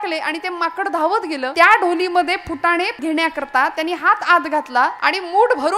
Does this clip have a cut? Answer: yes; 3 cuts; at 1.5 s, 3.0 s, 5.0 s

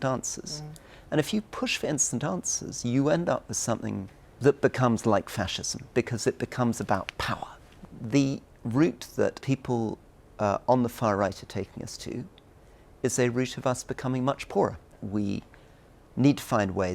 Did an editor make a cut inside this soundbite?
yes; 4 cuts; at 4.3 s, 7.8 s, 9.4 s, 15.0 s

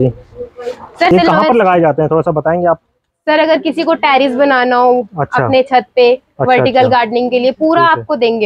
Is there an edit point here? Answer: yes; 1 cut; at 1.1 s

